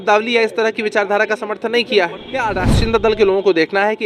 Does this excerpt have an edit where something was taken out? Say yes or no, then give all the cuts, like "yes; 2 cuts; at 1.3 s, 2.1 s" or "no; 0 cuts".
yes; 1 cut; at 2.4 s